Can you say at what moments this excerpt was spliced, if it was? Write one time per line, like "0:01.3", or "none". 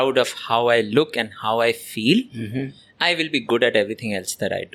none